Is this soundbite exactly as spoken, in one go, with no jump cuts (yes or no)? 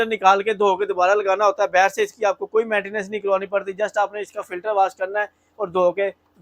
yes